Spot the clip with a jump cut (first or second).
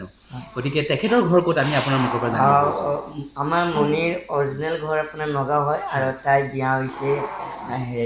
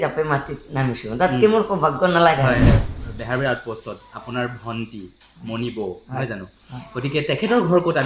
second